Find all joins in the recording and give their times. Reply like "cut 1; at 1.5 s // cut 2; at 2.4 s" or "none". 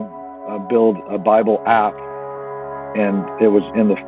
cut 1; at 2.6 s